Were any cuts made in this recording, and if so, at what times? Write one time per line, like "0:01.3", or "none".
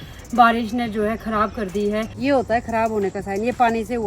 0:02.1